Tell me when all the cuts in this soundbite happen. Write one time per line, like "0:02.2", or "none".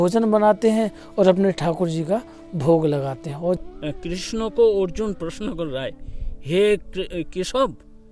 0:03.6